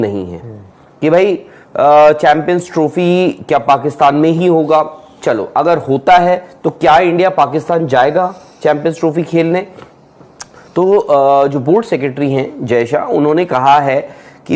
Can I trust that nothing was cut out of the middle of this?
yes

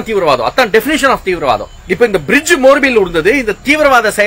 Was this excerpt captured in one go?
no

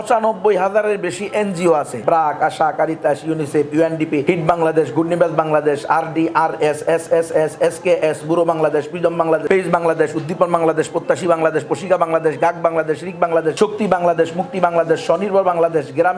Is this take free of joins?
no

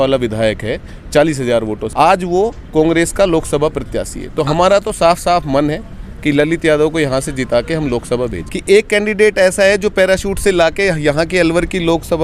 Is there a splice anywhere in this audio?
yes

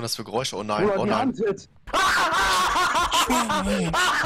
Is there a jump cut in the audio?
yes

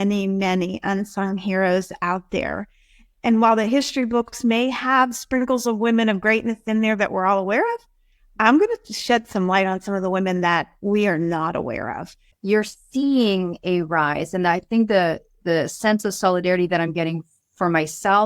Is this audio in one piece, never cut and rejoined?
no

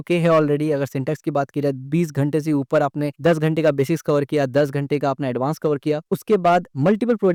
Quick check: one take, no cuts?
yes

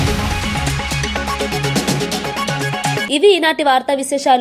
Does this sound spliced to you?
no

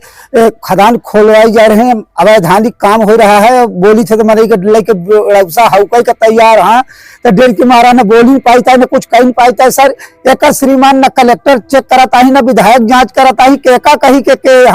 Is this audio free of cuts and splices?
yes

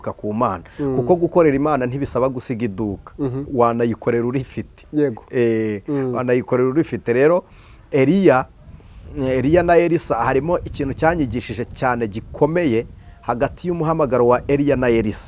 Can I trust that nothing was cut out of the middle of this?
yes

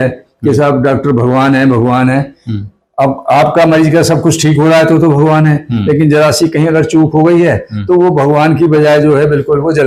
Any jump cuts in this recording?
no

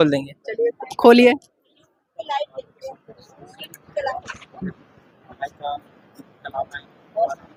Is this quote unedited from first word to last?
yes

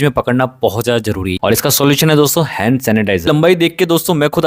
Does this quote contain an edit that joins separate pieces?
yes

